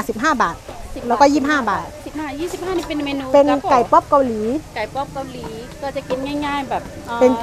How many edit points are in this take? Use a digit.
0